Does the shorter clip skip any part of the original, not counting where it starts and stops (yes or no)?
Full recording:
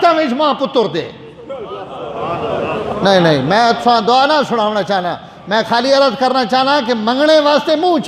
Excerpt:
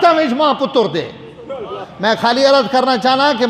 yes